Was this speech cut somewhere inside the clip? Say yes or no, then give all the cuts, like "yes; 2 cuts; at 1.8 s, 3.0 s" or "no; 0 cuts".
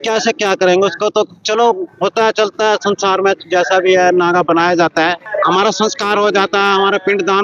yes; 1 cut; at 5.2 s